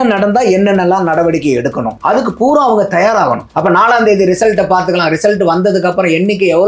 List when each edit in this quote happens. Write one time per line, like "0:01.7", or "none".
0:01.9
0:03.5

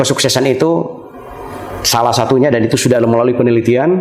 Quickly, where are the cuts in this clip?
none

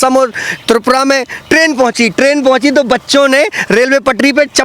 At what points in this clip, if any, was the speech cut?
none

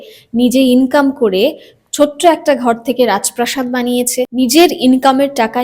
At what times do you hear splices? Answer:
0:04.3

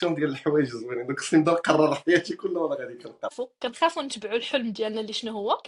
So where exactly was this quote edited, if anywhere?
0:03.3

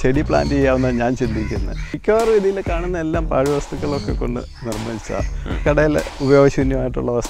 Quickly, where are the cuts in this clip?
0:01.9

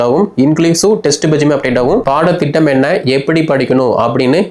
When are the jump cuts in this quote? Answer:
0:02.0

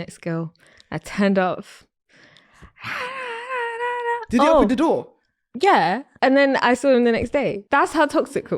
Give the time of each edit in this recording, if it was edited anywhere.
0:06.1
0:07.6

